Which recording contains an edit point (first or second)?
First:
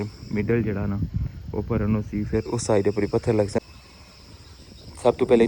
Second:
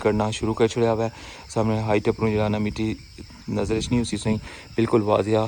first